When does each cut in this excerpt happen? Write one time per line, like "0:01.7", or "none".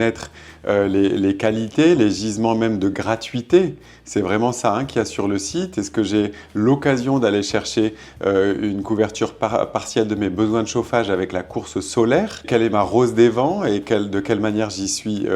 0:12.5